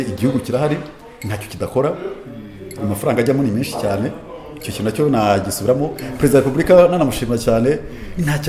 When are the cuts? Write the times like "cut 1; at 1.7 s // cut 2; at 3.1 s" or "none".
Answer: none